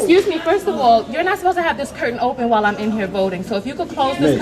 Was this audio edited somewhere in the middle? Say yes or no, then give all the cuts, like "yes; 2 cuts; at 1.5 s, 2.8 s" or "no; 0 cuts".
no; 0 cuts